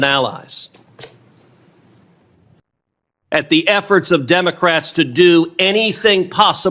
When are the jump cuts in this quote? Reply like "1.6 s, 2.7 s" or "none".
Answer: 2.6 s